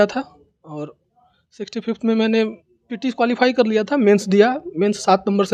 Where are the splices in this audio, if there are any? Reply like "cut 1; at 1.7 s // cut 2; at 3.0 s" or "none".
none